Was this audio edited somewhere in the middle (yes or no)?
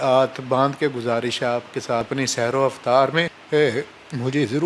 yes